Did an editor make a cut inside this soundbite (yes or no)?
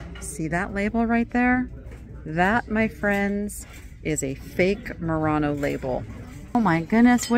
yes